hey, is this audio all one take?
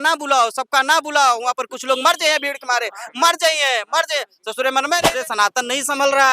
no; 1 cut; at 5.1 s

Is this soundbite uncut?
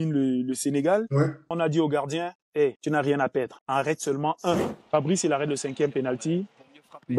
no; 4 cuts; at 1.5 s, 2.8 s, 3.6 s, 4.7 s

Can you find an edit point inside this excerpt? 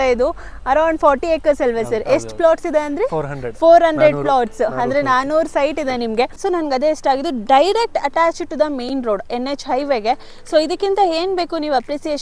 yes; 1 cut; at 6.4 s

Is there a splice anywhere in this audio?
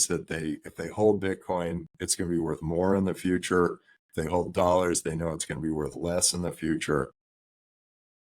no; 0 cuts

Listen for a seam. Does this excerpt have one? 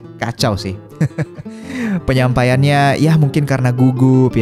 no; 0 cuts

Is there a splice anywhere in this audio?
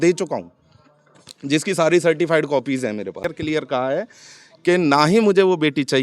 yes; 1 cut; at 3.2 s

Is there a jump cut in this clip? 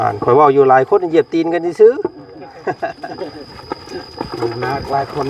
yes; 1 cut; at 3.0 s

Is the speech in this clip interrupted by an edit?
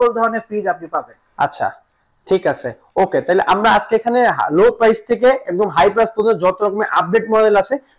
no; 0 cuts

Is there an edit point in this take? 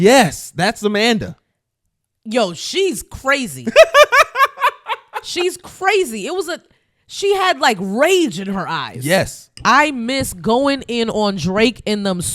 yes; 1 cut; at 9.4 s

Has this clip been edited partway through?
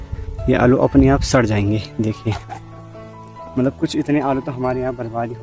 no; 0 cuts

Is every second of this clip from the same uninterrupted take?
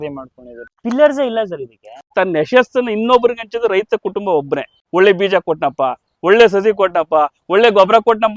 no; 3 cuts; at 0.8 s, 2.1 s, 4.8 s

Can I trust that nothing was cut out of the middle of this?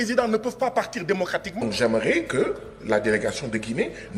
no; 1 cut; at 1.6 s

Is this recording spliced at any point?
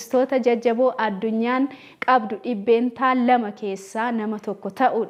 no; 0 cuts

